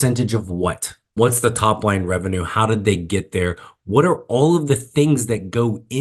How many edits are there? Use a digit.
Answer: 1